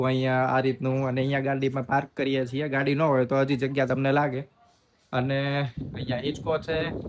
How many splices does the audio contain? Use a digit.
0